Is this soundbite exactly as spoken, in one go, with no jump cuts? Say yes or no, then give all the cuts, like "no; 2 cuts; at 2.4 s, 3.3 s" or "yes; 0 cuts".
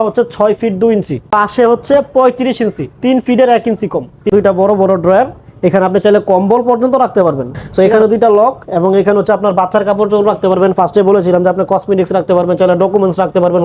no; 3 cuts; at 1.3 s, 4.3 s, 7.6 s